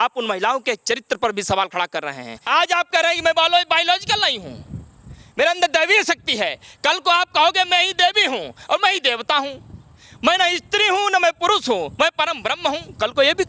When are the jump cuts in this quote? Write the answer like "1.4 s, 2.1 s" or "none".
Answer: 2.3 s